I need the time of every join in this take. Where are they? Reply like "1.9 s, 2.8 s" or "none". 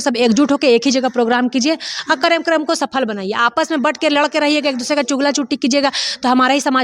none